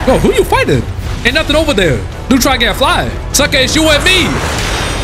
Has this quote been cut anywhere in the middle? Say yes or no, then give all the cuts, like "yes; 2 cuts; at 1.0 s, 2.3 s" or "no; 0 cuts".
no; 0 cuts